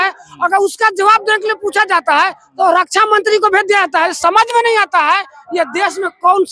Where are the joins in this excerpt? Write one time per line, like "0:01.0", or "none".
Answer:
none